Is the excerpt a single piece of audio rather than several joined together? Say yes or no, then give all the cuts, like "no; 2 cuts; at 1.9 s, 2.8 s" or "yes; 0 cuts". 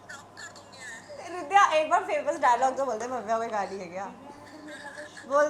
yes; 0 cuts